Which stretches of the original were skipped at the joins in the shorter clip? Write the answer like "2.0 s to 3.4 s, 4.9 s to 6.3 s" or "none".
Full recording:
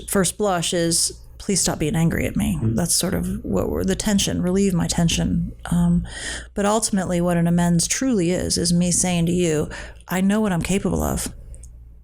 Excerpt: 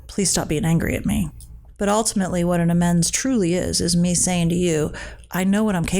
2.6 s to 6.1 s